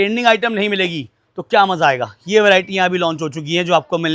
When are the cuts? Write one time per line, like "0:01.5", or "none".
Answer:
none

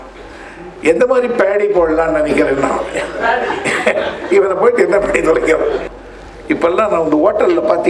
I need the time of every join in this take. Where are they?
0:06.0

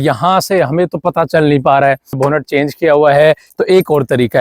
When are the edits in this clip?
0:02.2
0:03.5

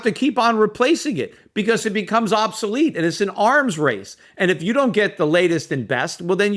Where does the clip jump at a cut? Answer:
none

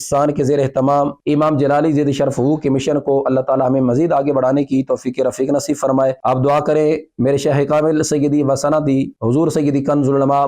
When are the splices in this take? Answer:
0:01.2

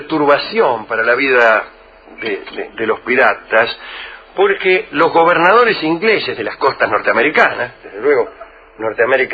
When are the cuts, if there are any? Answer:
0:07.3

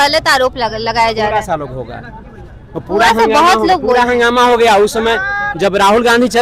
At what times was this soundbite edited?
none

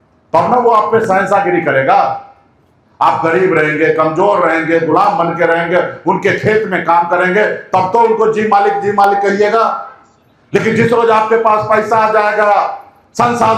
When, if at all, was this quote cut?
none

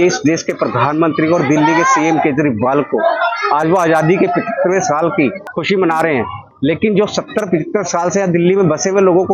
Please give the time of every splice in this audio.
0:05.5
0:06.5

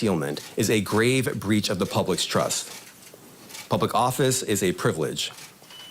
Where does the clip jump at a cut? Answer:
0:03.1

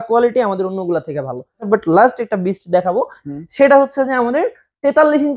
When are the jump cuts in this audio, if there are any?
0:01.7

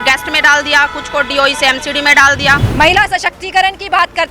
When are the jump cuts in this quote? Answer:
0:02.6

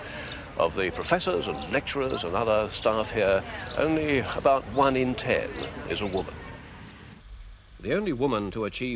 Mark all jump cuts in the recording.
0:02.2

